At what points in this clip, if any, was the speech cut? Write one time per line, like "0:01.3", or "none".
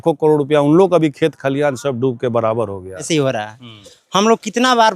0:03.0